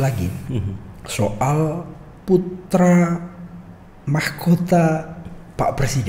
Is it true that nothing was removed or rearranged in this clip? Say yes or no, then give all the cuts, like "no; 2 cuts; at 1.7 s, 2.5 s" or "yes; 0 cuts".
yes; 0 cuts